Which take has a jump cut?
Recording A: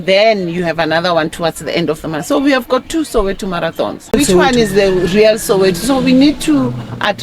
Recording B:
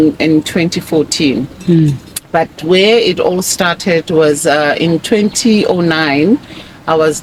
A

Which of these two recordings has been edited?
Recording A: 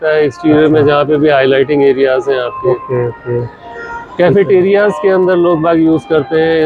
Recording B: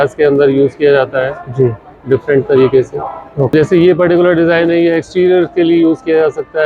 B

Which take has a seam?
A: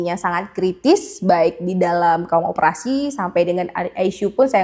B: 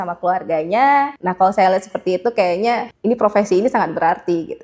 B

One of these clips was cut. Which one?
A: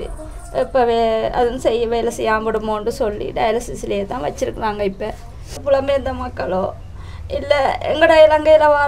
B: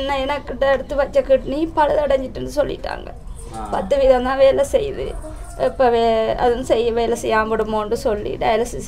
A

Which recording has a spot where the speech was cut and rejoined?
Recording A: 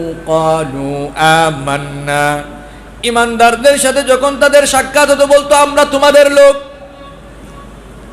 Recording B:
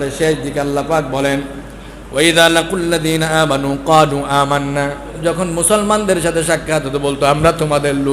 B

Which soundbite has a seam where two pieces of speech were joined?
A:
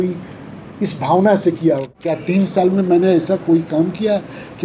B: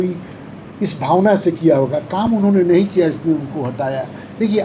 A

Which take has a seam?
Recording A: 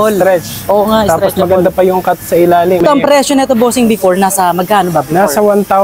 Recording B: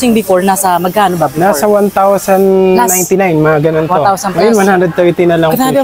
A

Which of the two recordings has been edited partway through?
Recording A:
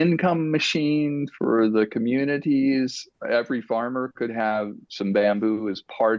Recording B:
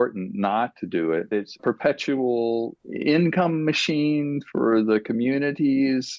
B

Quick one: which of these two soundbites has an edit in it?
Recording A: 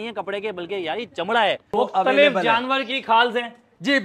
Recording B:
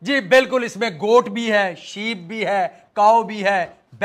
A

